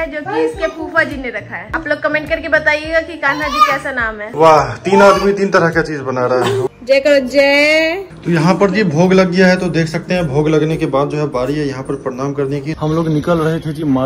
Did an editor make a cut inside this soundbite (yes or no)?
yes